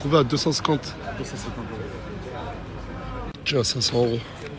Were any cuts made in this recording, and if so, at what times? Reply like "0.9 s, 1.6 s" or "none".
3.7 s